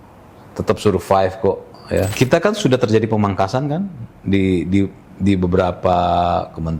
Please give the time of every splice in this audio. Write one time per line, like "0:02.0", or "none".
0:02.1